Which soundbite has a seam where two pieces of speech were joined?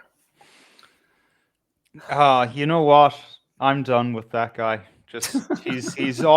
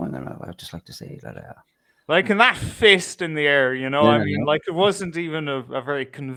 first; 1 cut; at 3.5 s

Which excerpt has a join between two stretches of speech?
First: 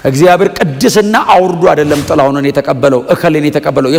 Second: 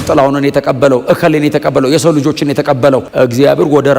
second; 1 cut; at 3.1 s

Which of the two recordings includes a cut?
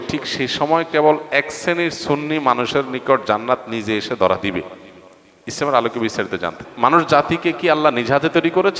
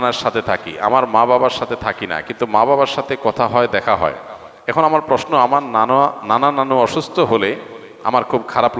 first; 1 cut; at 6.6 s

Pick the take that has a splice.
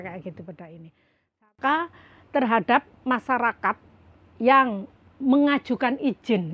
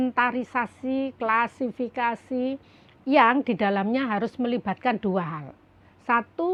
first; 1 cut; at 1.5 s

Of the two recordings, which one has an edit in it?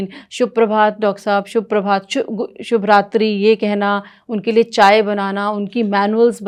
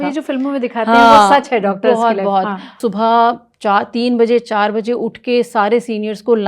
second; 1 cut; at 2.8 s

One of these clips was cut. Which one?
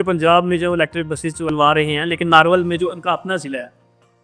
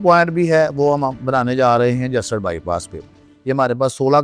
first; 1 cut; at 1.5 s

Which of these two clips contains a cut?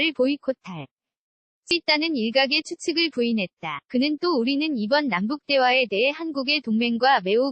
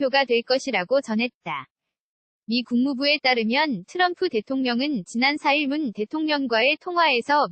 first; 1 cut; at 1.7 s

